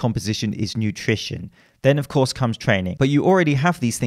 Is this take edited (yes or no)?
yes